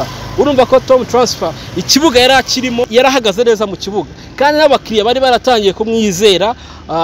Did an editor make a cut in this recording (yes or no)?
yes